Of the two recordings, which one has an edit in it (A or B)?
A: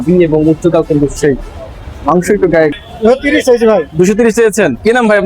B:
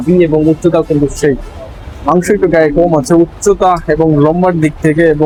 A